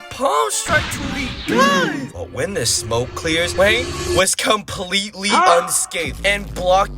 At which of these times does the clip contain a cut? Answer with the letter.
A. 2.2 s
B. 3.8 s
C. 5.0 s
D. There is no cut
A